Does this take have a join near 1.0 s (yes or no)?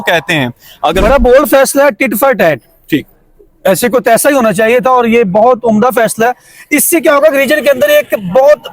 yes